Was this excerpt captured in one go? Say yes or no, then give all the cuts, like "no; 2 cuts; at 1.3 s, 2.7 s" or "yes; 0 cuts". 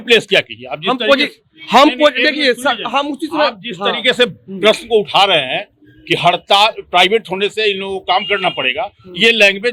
yes; 0 cuts